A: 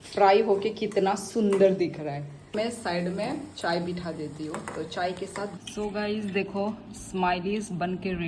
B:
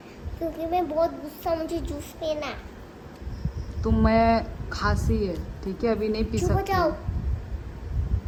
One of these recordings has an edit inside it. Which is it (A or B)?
A